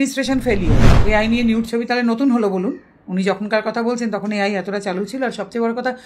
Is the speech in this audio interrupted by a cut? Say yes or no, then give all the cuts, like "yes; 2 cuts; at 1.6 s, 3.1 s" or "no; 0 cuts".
yes; 1 cut; at 1.0 s